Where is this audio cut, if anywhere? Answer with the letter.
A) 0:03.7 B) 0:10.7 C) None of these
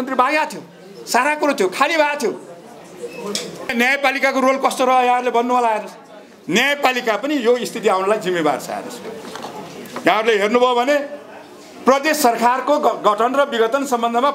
A